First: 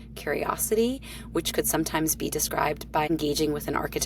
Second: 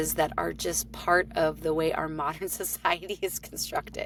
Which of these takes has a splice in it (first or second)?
first